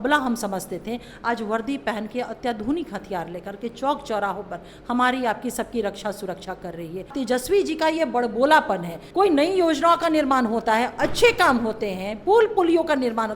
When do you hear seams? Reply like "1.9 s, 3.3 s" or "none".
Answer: 7.1 s, 8.9 s